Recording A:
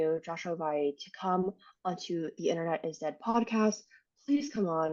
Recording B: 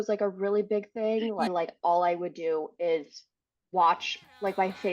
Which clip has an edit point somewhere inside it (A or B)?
B